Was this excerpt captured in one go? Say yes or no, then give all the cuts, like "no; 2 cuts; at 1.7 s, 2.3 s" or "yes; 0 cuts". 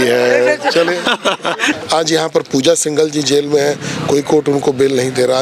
no; 1 cut; at 1.7 s